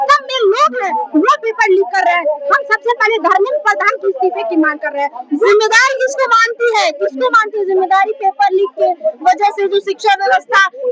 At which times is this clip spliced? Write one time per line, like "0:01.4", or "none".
none